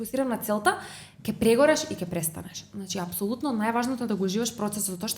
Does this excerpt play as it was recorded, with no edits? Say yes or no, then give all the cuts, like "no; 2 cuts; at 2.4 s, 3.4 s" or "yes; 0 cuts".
yes; 0 cuts